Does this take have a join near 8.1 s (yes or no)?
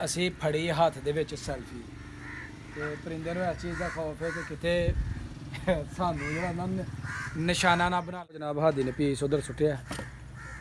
yes